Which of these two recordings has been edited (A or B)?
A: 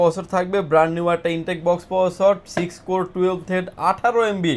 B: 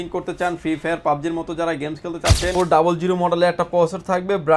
B